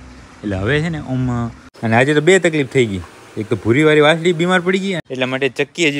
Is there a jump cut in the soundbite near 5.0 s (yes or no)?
yes